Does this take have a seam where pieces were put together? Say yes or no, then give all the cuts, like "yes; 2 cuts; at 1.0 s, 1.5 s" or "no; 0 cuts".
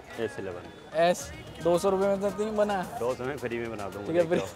yes; 1 cut; at 0.9 s